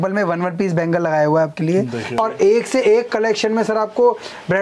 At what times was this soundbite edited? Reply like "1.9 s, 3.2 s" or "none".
2.0 s

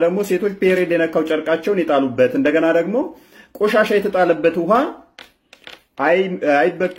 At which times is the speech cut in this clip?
none

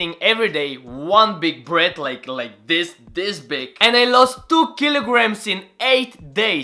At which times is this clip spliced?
none

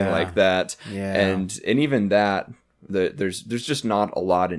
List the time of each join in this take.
none

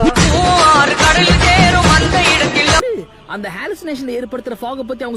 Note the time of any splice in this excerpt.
2.8 s

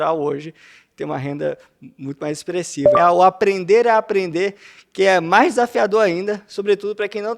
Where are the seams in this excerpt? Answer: 2.9 s

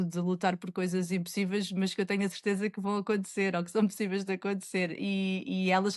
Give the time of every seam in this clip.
none

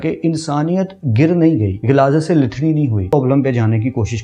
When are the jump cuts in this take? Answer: 1.7 s, 3.1 s

